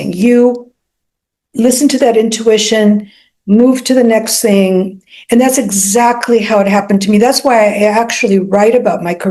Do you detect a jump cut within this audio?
no; 0 cuts

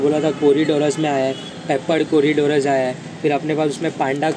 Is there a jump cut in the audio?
no; 0 cuts

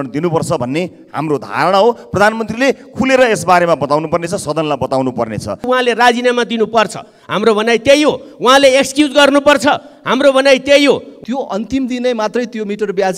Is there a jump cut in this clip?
yes; 2 cuts; at 5.7 s, 11.1 s

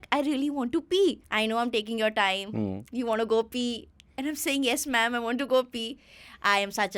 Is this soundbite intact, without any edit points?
no; 1 cut; at 1.2 s

